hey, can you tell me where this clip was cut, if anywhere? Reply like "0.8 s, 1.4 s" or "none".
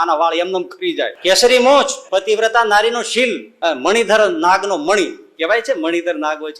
1.2 s, 2.0 s, 3.5 s